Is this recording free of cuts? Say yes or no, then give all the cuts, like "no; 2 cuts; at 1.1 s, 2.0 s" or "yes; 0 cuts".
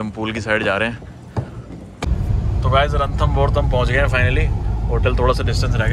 no; 1 cut; at 2.1 s